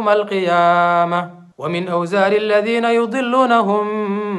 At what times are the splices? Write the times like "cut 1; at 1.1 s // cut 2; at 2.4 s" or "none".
cut 1; at 1.4 s